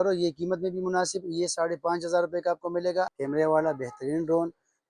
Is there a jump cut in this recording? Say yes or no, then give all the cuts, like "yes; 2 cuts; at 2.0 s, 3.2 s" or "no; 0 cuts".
yes; 1 cut; at 3.2 s